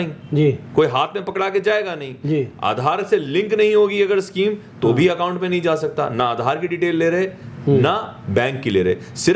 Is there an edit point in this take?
no; 0 cuts

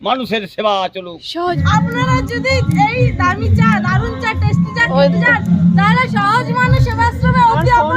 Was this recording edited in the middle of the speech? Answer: yes; 1 cut; at 1.3 s

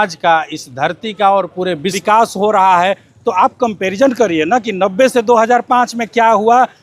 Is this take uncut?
no; 1 cut; at 2.0 s

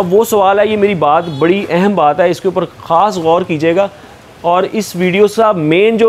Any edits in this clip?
no; 0 cuts

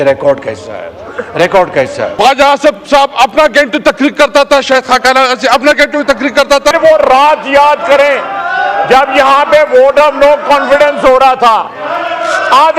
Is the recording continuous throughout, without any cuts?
no; 2 cuts; at 2.1 s, 6.7 s

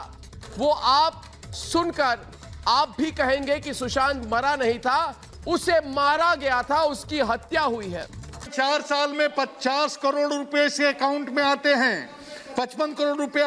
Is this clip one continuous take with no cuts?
no; 1 cut; at 8.4 s

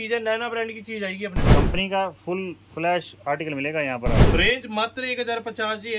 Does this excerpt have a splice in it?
yes; 2 cuts; at 1.5 s, 4.3 s

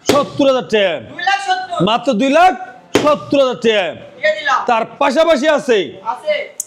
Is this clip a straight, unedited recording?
yes; 0 cuts

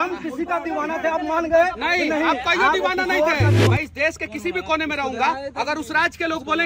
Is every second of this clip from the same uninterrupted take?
no; 1 cut; at 3.6 s

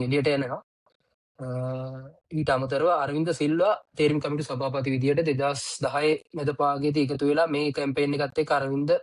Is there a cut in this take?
no; 0 cuts

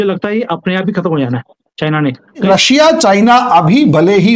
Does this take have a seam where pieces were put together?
yes; 1 cut; at 2.5 s

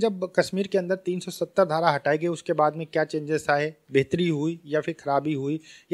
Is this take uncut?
yes; 0 cuts

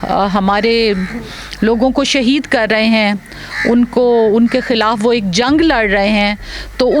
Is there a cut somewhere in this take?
no; 0 cuts

